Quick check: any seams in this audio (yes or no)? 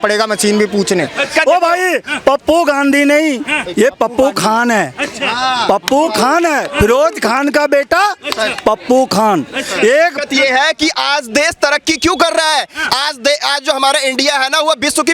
yes